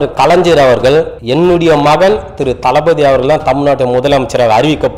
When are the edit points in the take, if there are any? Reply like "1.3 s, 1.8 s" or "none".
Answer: 1.2 s